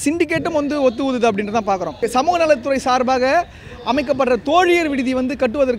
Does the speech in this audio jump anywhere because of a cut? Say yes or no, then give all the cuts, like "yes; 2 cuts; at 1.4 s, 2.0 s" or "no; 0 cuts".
yes; 1 cut; at 2.0 s